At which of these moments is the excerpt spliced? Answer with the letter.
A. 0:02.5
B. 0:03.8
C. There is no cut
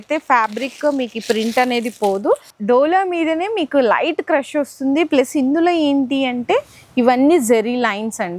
A